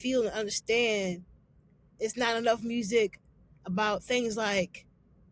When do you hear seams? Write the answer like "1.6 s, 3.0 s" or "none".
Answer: none

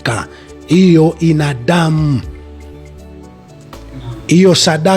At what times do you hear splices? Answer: 2.6 s, 4.0 s

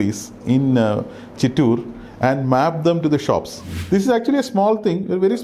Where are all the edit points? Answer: 3.8 s

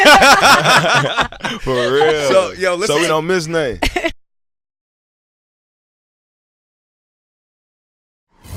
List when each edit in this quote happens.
none

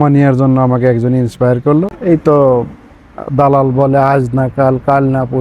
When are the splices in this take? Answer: 1.9 s

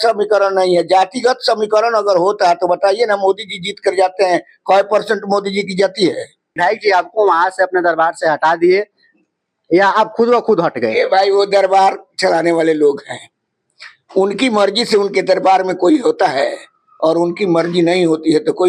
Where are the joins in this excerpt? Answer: 6.6 s

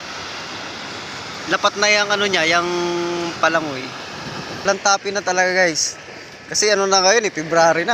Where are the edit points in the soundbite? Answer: 4.6 s

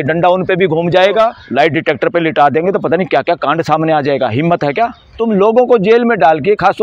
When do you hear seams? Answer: 1.4 s, 5.0 s

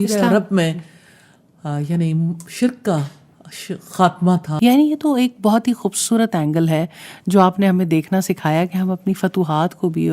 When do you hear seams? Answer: 4.5 s

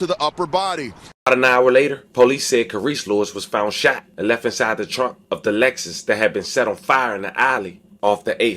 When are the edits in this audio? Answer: none

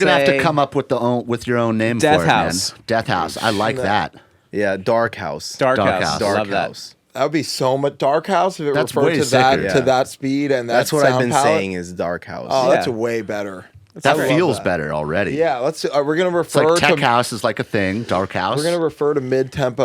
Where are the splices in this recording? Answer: none

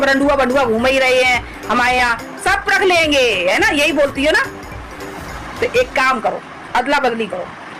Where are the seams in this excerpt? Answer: none

